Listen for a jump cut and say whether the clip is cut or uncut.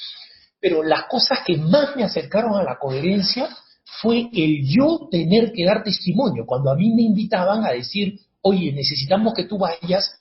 uncut